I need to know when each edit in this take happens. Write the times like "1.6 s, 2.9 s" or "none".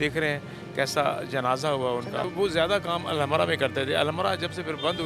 2.3 s